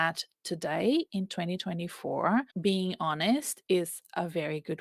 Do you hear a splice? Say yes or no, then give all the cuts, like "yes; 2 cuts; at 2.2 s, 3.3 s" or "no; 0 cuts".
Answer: yes; 1 cut; at 2.5 s